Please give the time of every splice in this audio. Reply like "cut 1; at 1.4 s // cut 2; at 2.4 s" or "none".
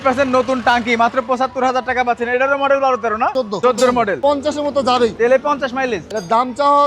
cut 1; at 3.4 s // cut 2; at 4.2 s